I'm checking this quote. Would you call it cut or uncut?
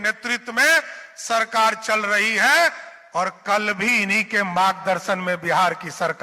uncut